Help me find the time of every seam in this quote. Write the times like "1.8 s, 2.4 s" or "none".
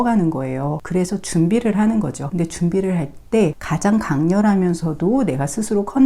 0.8 s, 2.2 s, 3.6 s